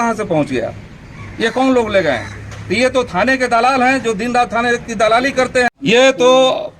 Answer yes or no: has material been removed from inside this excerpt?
yes